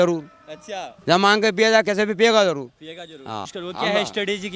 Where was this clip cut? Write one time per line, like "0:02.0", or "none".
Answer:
0:03.5